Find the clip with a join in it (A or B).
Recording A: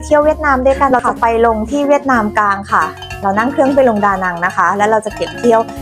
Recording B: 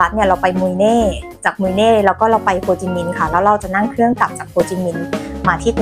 A